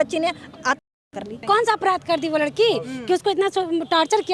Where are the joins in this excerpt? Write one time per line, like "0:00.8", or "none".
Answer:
0:01.4